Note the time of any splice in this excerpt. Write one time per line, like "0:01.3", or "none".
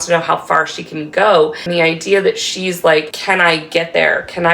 0:01.6